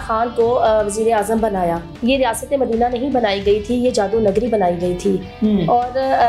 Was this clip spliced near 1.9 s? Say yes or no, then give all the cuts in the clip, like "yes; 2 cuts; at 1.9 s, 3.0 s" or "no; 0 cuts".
yes; 1 cut; at 1.9 s